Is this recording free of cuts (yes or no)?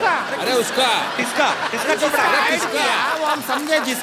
yes